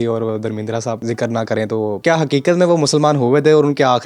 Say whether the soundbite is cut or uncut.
cut